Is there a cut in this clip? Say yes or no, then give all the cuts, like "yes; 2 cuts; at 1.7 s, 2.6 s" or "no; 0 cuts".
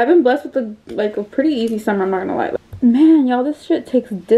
yes; 1 cut; at 2.5 s